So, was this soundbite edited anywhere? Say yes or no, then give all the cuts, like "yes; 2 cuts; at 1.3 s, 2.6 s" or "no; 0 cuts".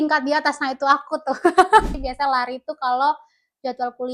yes; 1 cut; at 1.9 s